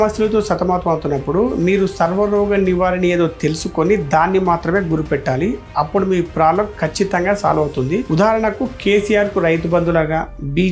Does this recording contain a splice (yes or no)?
no